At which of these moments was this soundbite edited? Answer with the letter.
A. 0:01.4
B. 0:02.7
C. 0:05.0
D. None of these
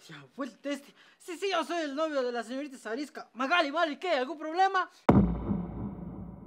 C